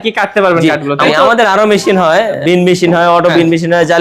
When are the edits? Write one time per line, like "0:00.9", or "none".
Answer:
0:01.1
0:02.4